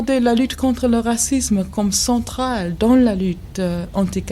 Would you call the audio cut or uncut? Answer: uncut